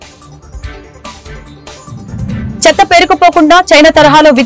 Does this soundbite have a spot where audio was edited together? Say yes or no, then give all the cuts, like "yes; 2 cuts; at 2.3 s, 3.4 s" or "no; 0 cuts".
yes; 1 cut; at 1.6 s